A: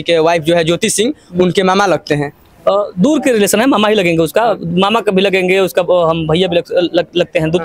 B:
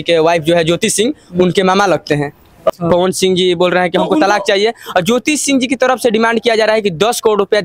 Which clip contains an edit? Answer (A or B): B